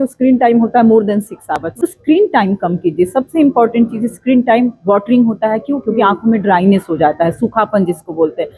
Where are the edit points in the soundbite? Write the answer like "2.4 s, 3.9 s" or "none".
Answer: 1.7 s